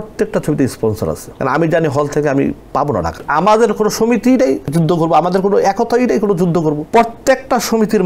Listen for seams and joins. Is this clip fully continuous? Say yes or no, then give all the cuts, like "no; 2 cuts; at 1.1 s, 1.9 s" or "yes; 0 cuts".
no; 4 cuts; at 1.3 s, 3.2 s, 4.7 s, 6.8 s